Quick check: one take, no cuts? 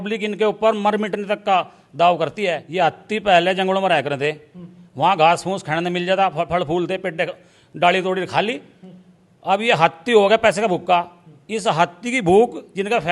no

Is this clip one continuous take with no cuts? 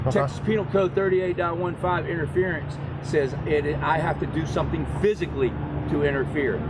yes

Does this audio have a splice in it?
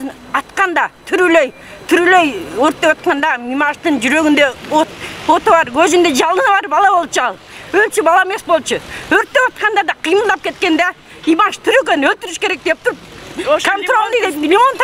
no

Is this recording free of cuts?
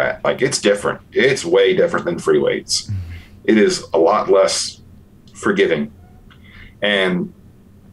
yes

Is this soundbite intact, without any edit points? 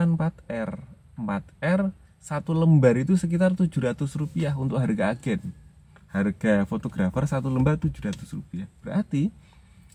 yes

